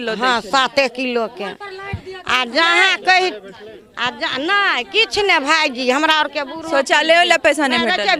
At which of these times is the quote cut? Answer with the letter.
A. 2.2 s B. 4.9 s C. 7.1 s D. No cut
D